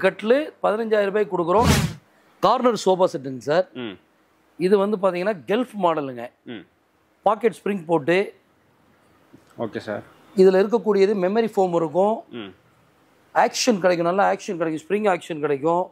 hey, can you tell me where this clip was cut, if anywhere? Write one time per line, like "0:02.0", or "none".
0:01.8

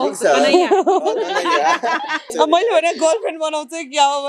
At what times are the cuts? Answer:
0:02.3

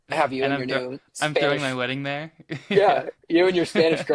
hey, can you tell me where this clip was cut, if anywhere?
none

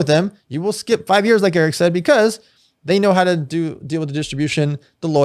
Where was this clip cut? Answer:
none

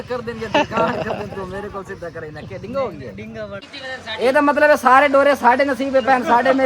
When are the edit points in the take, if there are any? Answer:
0:03.6

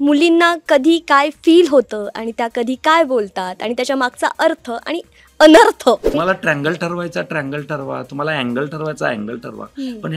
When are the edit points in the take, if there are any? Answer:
0:06.1

